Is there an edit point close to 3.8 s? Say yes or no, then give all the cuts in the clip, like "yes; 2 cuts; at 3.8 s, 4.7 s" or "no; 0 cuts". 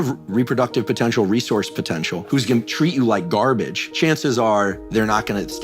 yes; 2 cuts; at 2.2 s, 3.8 s